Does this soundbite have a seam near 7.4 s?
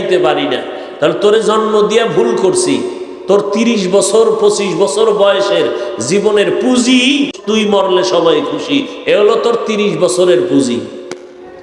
yes; 1 cut; at 7.4 s

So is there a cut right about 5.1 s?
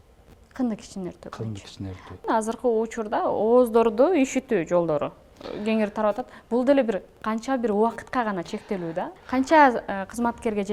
no; 2 cuts; at 2.2 s, 9.1 s

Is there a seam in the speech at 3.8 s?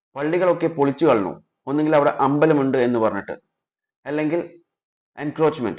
no; 0 cuts

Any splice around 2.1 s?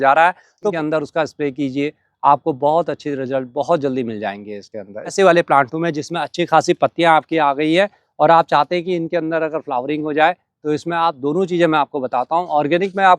no; 2 cuts; at 0.7 s, 5.1 s

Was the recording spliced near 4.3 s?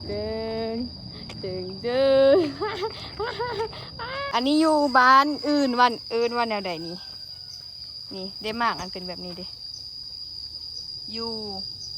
yes; 1 cut; at 4.3 s

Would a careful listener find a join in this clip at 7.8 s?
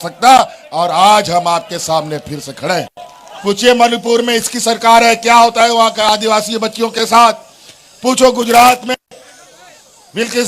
no; 1 cut; at 3.3 s

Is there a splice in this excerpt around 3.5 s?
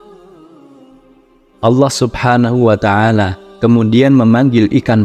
no; 1 cut; at 1.6 s

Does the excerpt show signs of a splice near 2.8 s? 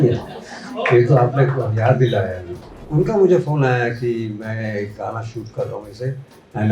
yes; 1 cut; at 2.8 s

